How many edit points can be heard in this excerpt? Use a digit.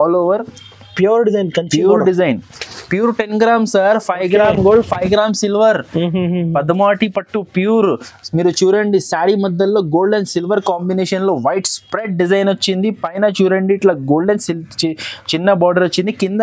0